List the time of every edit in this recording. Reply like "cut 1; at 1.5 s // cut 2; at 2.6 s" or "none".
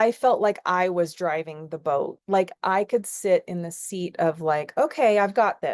none